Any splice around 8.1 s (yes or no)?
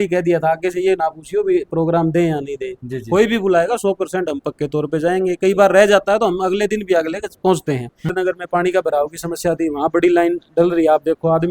yes